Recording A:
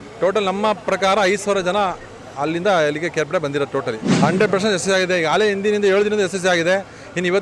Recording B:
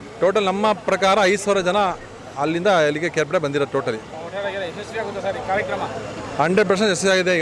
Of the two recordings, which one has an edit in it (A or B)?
A